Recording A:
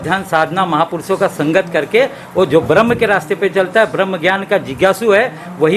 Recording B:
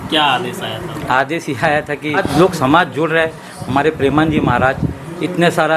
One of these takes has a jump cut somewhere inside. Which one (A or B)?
B